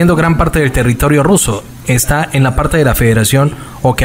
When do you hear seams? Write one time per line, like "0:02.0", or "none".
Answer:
none

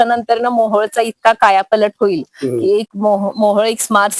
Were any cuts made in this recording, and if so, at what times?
none

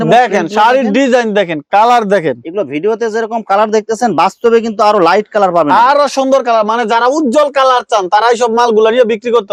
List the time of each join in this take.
none

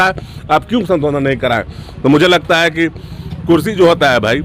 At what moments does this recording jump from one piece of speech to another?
none

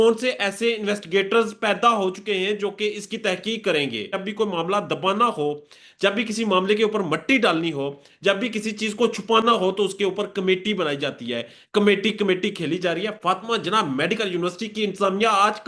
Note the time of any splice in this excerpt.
0:04.2

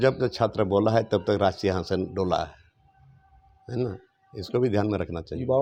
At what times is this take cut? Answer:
none

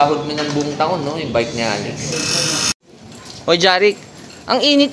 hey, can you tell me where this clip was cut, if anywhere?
0:02.7

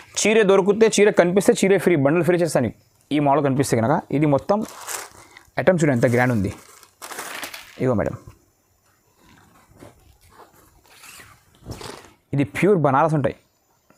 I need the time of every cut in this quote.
none

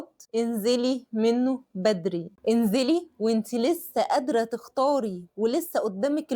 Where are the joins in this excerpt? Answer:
0:02.3

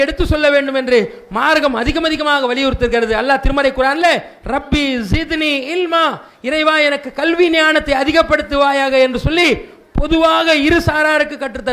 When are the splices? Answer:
none

